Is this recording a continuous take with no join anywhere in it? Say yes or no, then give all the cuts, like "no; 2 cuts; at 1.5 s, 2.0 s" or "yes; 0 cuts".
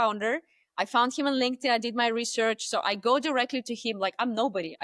yes; 0 cuts